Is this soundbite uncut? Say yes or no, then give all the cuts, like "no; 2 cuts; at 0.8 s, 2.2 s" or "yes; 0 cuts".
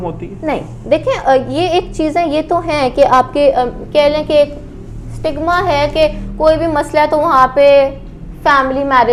yes; 0 cuts